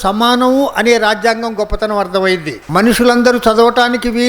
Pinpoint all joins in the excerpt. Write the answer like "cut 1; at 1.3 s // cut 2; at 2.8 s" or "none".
cut 1; at 2.6 s